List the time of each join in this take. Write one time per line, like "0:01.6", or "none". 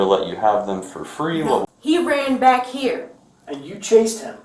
0:01.6

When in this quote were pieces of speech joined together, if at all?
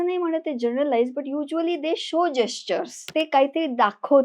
0:03.1

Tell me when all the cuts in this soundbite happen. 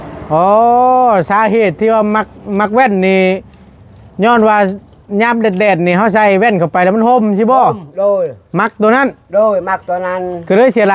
none

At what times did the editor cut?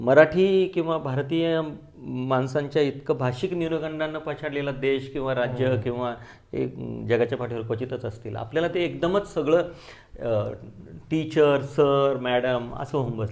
none

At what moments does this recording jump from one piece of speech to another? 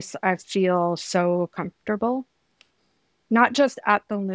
none

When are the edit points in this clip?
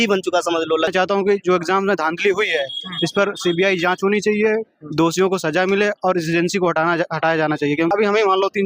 0:00.9
0:07.9

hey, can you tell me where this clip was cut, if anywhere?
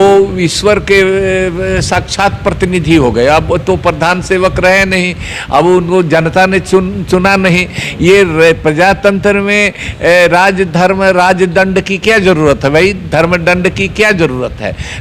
none

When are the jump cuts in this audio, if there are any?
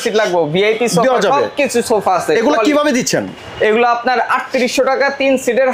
none

